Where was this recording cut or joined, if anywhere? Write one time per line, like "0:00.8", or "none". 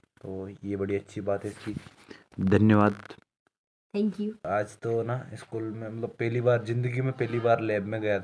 0:04.5